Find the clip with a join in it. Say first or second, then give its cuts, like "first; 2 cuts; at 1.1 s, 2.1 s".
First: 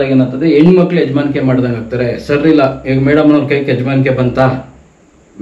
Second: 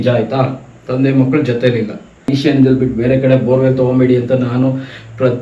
second; 1 cut; at 2.3 s